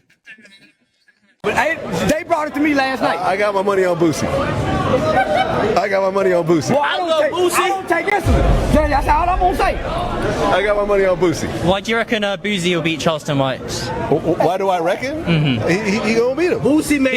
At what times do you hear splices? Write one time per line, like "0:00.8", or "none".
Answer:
0:01.3